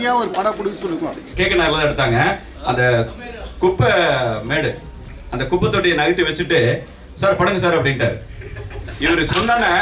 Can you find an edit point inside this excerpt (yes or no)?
yes